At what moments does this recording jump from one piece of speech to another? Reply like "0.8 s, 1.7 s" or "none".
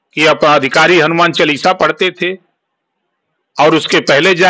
none